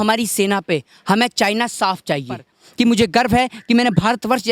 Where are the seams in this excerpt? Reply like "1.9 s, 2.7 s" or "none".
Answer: 2.6 s

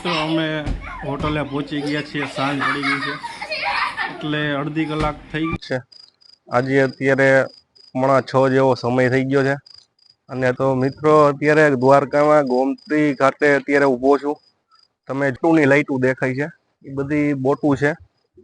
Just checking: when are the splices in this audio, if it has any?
5.6 s, 10.6 s, 15.4 s

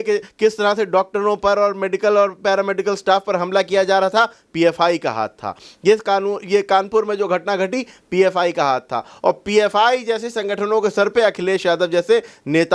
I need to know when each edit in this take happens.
none

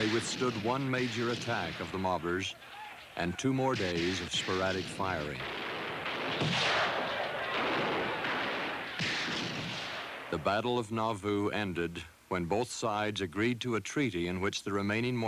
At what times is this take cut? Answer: 12.7 s

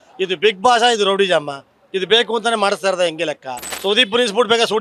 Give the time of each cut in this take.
3.7 s

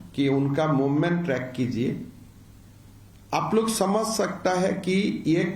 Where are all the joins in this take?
none

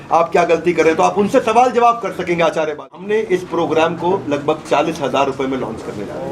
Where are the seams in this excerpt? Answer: 3.0 s

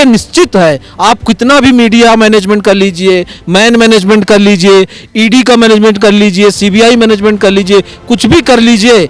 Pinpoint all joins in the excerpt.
none

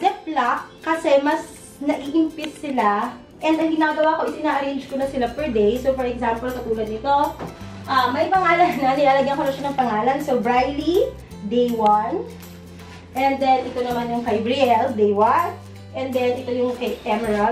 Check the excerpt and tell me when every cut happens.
none

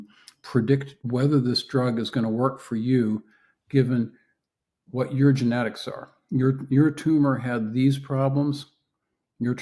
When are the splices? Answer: 0.9 s

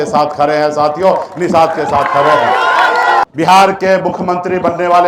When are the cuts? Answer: 3.2 s

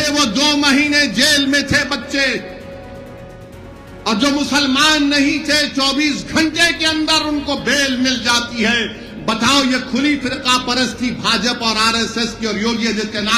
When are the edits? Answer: none

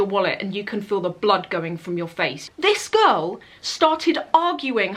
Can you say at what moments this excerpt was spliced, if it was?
2.4 s

